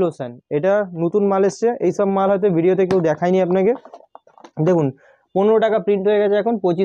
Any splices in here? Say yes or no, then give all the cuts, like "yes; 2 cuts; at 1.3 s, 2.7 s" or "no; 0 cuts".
no; 0 cuts